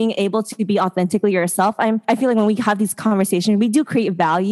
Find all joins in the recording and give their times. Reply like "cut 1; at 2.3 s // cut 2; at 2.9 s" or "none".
cut 1; at 2.0 s